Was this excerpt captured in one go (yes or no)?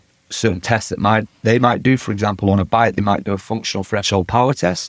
yes